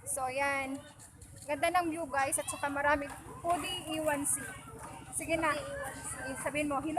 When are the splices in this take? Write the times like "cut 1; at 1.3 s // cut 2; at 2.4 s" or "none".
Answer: cut 1; at 3.1 s